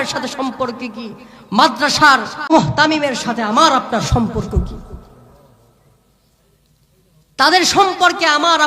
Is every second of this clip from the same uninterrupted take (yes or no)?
no